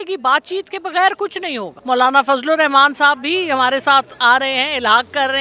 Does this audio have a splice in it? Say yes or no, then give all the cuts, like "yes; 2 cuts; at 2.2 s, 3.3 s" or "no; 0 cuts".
yes; 1 cut; at 1.7 s